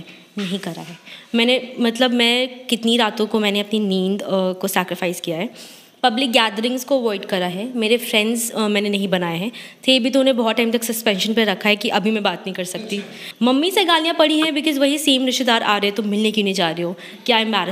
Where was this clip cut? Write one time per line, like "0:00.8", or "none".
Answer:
0:13.2